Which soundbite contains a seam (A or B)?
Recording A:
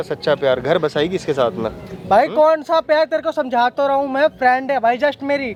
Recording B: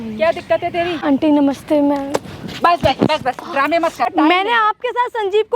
B